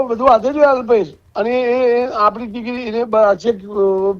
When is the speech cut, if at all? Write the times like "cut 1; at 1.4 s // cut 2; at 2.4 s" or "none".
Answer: cut 1; at 1.2 s